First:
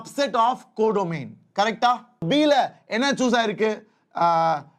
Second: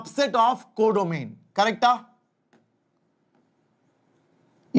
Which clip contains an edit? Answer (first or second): first